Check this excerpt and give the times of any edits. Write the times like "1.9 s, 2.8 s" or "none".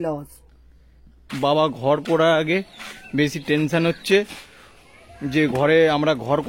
1.3 s